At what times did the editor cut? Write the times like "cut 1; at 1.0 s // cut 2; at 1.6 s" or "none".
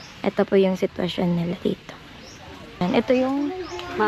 cut 1; at 2.8 s